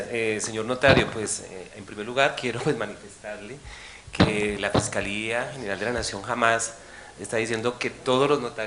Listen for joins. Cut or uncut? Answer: cut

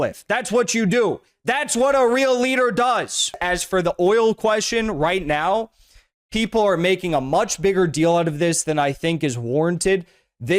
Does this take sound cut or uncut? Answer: cut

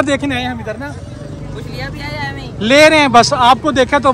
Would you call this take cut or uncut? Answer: uncut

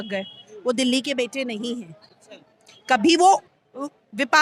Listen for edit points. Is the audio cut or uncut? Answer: uncut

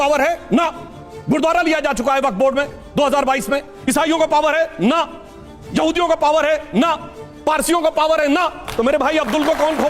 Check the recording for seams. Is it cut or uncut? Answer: uncut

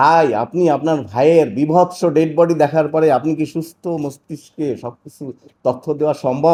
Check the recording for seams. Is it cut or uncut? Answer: uncut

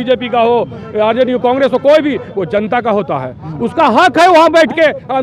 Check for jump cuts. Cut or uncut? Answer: uncut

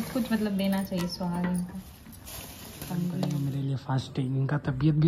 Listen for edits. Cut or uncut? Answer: cut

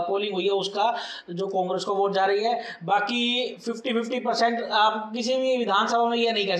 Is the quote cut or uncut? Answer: uncut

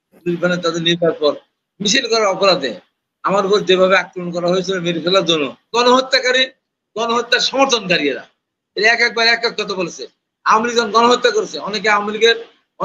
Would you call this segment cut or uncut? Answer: cut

